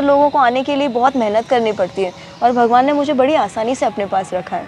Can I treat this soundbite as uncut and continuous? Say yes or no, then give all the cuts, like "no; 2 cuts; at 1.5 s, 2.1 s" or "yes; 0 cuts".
yes; 0 cuts